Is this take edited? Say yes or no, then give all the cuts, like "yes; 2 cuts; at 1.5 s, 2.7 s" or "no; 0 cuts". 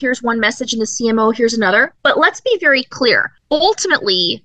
yes; 2 cuts; at 1.9 s, 3.3 s